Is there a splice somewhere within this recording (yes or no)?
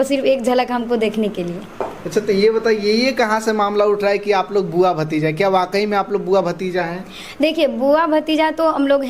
no